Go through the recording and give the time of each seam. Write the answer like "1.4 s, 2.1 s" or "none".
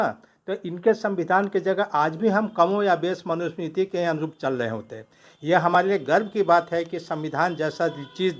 none